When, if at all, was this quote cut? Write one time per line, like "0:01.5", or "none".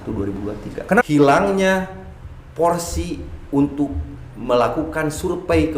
0:01.0